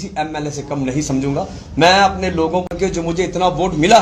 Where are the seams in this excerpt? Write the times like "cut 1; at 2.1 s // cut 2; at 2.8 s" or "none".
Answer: cut 1; at 2.7 s